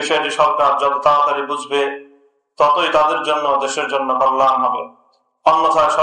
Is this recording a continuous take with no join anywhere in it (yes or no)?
yes